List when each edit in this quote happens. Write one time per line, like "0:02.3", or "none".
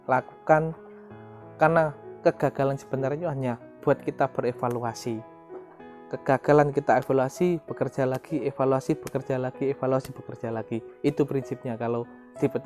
none